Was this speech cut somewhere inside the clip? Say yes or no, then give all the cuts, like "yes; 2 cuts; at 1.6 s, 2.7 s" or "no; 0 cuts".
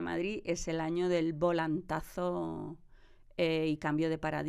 no; 0 cuts